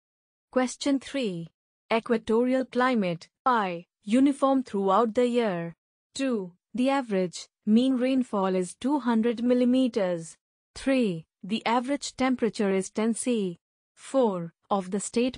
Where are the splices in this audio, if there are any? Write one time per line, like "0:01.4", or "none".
0:03.6